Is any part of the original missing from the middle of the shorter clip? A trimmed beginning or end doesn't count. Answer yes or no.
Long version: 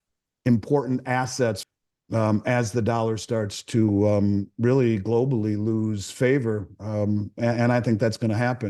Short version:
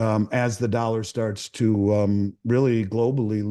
no